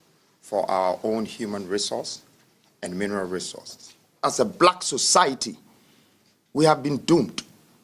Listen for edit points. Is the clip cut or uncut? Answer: cut